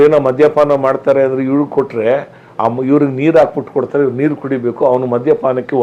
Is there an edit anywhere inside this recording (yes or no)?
no